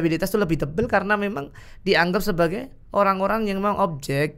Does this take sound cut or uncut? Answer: uncut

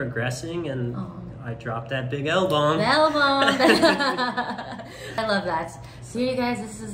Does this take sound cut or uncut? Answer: cut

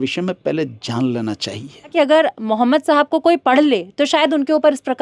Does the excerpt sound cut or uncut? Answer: cut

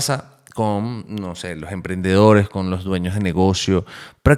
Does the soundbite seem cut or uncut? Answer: uncut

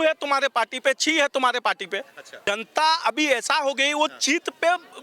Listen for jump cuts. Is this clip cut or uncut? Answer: cut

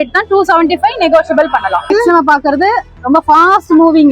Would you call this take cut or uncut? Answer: cut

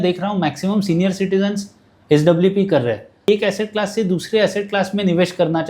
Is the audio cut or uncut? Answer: cut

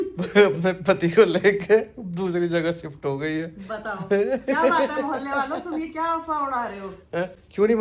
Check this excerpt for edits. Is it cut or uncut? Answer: uncut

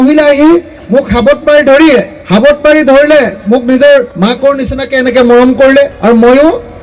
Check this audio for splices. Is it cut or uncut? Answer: cut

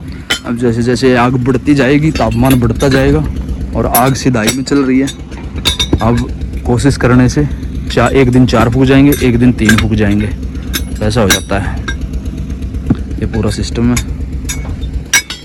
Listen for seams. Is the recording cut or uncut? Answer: uncut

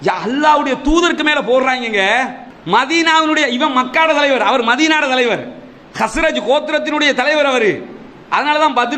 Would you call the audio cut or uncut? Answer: cut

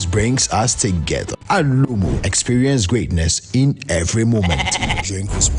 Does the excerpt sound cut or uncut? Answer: uncut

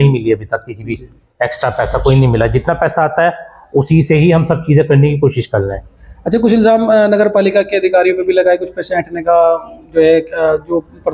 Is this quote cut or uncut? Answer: uncut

